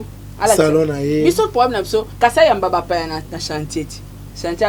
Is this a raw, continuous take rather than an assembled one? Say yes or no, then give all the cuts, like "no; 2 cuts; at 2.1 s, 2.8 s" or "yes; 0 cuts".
no; 1 cut; at 2.1 s